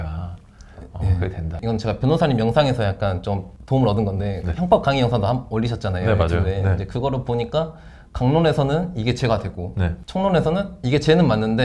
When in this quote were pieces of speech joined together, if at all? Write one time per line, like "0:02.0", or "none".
0:01.5
0:03.5
0:10.0